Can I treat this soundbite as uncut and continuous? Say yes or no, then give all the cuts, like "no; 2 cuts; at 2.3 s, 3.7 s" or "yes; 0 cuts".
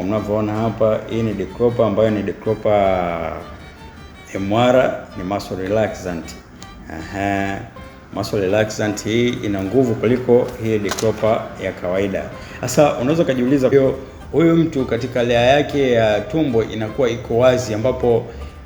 no; 1 cut; at 13.7 s